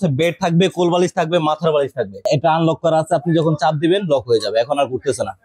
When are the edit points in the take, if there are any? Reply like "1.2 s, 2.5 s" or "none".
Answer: 2.2 s